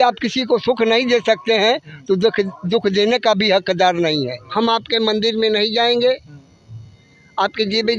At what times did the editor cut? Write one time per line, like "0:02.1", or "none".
0:04.4

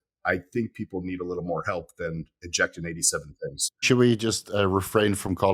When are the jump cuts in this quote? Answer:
0:03.8

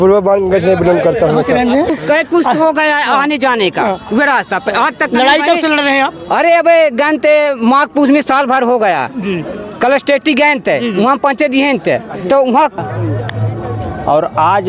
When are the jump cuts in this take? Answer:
0:01.9
0:12.8

